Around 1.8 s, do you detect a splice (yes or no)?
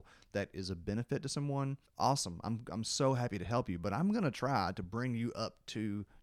yes